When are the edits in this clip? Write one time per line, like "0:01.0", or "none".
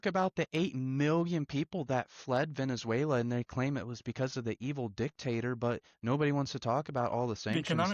none